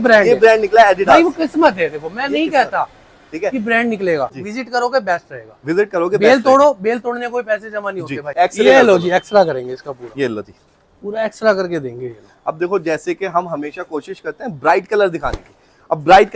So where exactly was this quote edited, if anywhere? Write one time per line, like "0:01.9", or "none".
0:04.3
0:08.3